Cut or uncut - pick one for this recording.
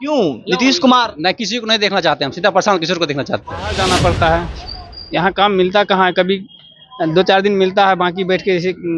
cut